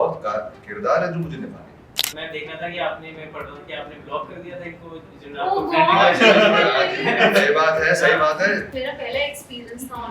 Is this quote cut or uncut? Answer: cut